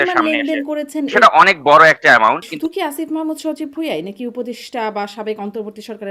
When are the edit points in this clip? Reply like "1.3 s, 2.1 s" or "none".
1.1 s, 2.5 s